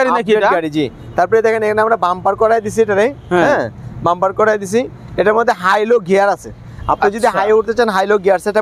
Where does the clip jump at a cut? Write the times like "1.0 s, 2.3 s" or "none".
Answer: none